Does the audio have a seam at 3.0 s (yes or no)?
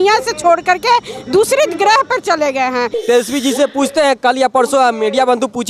yes